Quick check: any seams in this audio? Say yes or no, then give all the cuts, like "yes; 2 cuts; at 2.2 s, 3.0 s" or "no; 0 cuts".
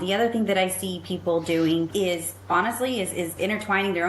yes; 2 cuts; at 1.9 s, 3.3 s